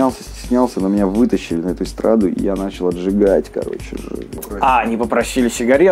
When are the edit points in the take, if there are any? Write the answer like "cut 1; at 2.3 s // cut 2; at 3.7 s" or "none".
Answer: cut 1; at 4.3 s